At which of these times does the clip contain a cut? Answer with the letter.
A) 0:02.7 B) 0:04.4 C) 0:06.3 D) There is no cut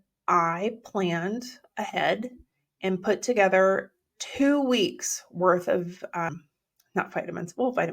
C